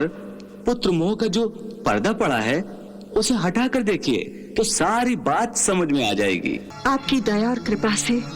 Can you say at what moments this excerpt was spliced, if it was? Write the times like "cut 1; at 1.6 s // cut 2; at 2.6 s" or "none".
cut 1; at 6.7 s